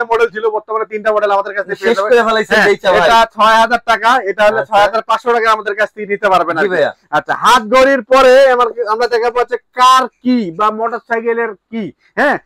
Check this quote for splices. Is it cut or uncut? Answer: uncut